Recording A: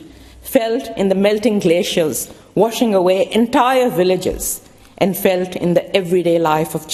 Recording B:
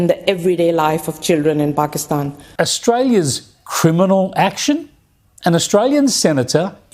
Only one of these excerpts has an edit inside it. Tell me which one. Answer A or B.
B